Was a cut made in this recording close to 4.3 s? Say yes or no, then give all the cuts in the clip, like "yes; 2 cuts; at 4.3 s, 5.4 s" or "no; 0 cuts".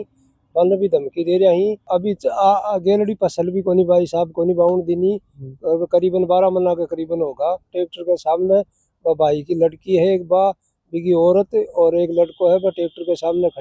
no; 2 cuts; at 1.8 s, 7.7 s